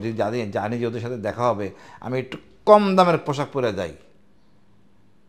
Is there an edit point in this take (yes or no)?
no